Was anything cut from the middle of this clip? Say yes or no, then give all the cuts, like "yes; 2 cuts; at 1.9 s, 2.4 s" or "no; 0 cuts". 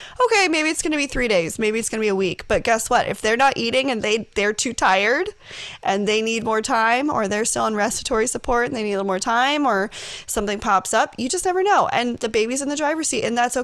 no; 0 cuts